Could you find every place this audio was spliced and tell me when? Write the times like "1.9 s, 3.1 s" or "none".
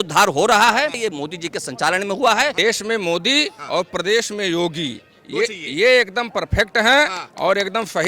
1.0 s, 2.6 s